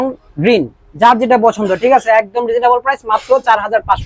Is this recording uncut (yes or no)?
yes